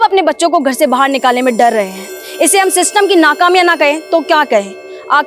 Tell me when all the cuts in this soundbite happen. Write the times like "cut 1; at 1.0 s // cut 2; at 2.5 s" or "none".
none